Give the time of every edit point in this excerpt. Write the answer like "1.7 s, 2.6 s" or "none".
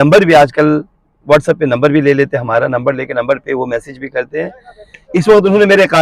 none